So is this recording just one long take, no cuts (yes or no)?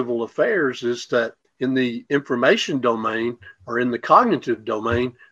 no